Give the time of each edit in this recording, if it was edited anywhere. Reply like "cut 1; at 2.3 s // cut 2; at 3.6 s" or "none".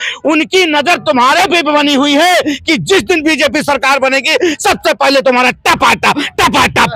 none